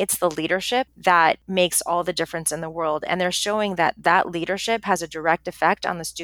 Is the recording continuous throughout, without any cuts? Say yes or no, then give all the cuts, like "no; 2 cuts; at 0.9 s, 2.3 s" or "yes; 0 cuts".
no; 2 cuts; at 0.9 s, 1.4 s